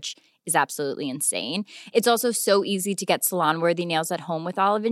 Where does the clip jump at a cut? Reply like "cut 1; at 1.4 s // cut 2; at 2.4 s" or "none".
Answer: none